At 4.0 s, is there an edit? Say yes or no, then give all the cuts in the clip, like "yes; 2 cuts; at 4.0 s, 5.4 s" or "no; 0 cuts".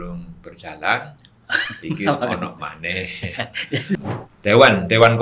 yes; 1 cut; at 4.0 s